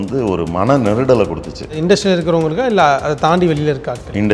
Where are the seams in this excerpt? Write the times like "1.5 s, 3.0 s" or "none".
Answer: 1.7 s